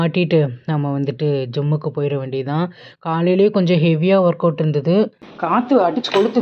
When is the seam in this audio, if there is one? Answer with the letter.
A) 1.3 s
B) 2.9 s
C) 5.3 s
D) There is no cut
C